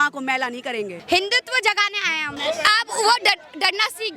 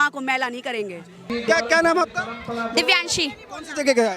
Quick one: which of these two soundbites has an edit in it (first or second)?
first